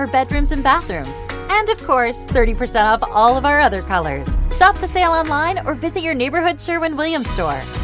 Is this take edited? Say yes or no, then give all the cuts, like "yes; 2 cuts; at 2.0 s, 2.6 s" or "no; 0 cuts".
no; 0 cuts